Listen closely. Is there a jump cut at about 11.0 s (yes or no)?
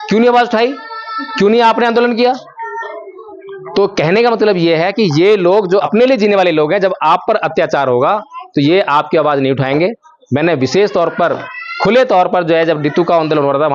no